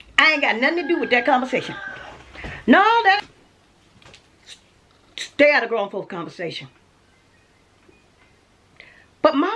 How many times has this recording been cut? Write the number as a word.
one